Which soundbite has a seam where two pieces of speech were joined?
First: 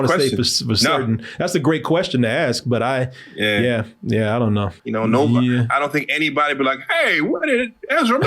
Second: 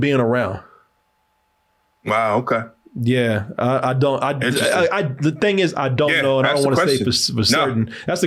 first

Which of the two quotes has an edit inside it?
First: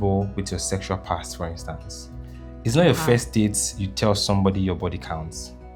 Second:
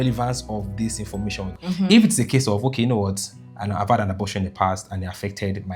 second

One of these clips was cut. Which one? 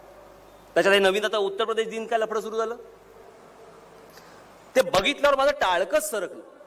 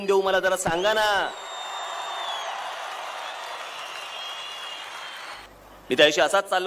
second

